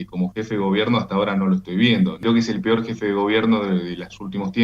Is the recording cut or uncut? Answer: cut